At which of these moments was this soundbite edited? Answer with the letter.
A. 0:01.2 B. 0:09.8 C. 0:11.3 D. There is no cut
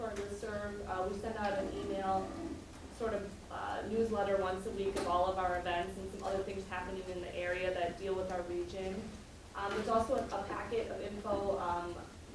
B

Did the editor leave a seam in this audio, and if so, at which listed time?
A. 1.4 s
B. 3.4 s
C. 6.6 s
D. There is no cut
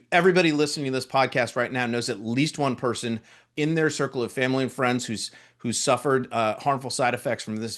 B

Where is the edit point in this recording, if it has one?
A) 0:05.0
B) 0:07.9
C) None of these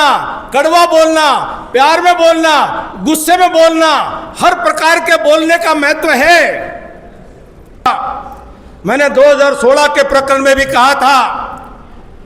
B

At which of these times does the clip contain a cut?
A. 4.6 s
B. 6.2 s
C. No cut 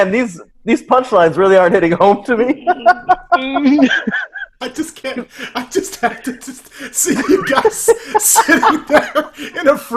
A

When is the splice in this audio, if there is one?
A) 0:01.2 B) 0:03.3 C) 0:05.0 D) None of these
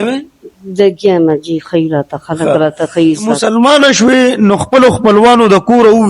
B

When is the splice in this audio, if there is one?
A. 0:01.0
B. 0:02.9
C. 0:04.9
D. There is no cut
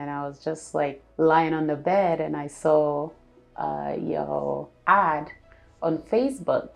A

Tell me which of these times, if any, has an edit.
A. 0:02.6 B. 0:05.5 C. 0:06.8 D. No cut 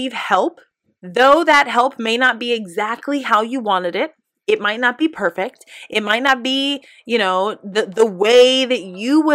D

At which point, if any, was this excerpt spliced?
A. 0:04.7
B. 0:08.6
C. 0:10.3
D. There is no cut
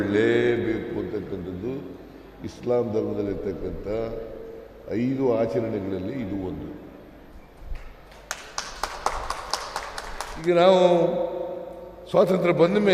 C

